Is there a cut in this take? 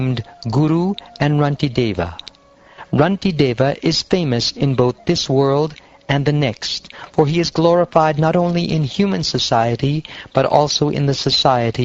no; 0 cuts

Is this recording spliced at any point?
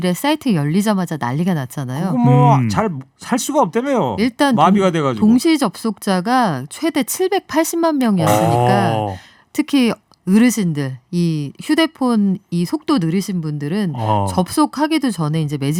no; 0 cuts

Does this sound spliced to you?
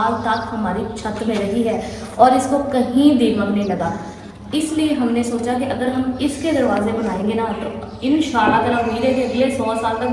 no; 0 cuts

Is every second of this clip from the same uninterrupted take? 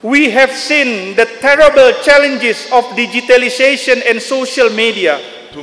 yes; 0 cuts

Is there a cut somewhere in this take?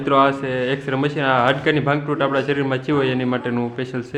no; 0 cuts

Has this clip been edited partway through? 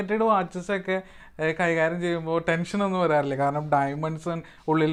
no; 0 cuts

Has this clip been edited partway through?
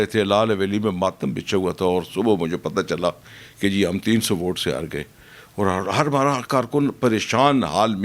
no; 0 cuts

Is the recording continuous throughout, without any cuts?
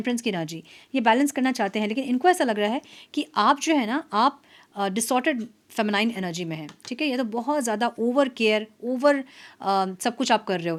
yes; 0 cuts

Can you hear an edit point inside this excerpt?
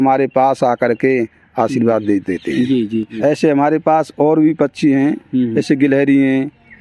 yes; 1 cut; at 3.1 s

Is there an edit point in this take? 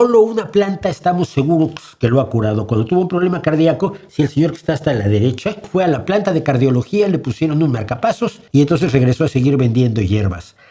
yes; 2 cuts; at 5.7 s, 8.4 s

